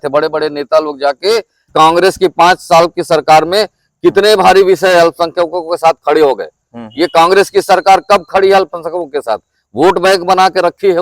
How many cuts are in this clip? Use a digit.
1